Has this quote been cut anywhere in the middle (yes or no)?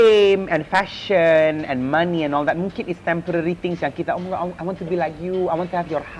no